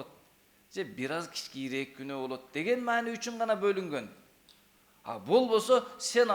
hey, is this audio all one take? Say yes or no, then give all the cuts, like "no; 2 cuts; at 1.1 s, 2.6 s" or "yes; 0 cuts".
yes; 0 cuts